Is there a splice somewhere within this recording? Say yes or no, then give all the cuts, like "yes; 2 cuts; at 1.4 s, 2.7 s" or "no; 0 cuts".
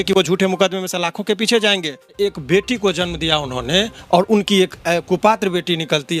yes; 1 cut; at 2.1 s